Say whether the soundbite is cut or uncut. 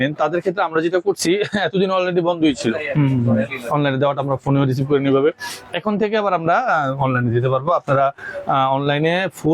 uncut